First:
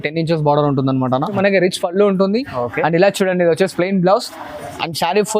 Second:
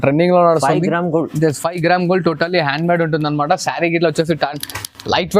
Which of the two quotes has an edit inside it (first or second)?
first